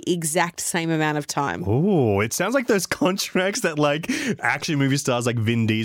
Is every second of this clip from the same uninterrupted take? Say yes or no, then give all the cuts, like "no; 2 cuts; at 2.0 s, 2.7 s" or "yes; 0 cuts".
yes; 0 cuts